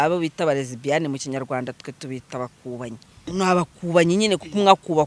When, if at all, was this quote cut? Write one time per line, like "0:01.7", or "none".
0:03.3

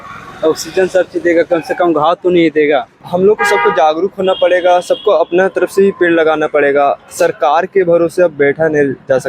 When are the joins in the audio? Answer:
0:03.0

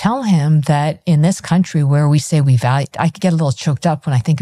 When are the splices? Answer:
none

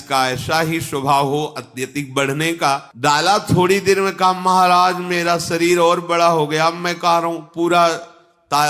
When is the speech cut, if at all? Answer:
0:02.9

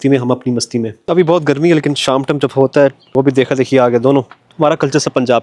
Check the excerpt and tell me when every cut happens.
0:01.0
0:03.0
0:04.4

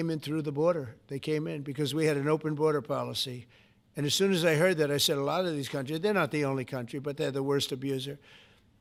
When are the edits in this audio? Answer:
none

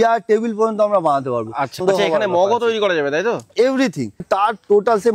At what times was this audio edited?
0:01.8
0:04.2

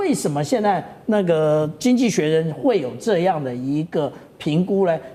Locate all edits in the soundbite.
none

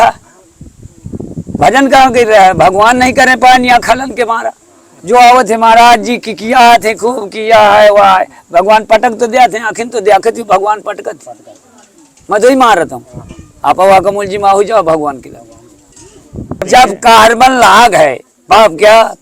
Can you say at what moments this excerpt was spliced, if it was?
0:16.1

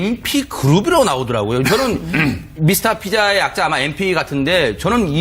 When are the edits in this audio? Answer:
none

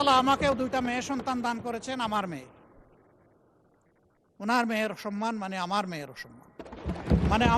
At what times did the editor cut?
none

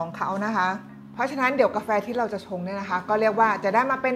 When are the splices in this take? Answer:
0:01.0

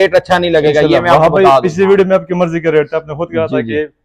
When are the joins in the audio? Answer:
none

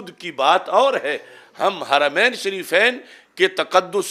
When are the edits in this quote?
none

